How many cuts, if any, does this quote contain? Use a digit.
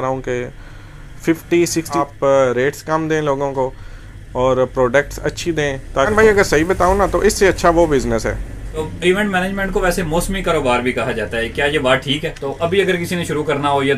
4